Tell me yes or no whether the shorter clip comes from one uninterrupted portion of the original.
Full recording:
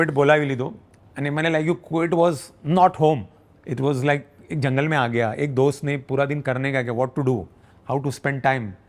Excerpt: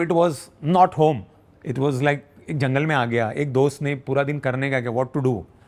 yes